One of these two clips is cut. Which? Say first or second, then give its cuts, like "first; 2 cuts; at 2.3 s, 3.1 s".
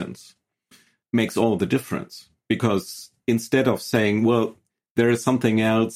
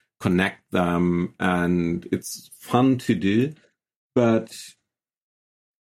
first; 2 cuts; at 1.0 s, 2.3 s